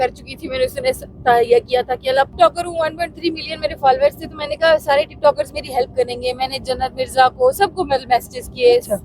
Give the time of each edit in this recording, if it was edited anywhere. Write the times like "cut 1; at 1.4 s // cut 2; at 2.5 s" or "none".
cut 1; at 2.3 s